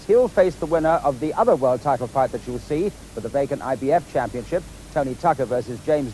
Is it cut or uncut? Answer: uncut